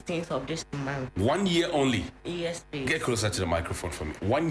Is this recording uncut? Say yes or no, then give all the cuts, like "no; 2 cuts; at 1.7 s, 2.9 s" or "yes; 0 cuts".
no; 1 cut; at 3.3 s